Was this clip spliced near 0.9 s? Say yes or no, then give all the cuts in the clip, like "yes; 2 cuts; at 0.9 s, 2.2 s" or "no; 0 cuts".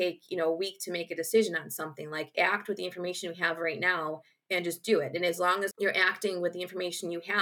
no; 2 cuts; at 2.3 s, 5.8 s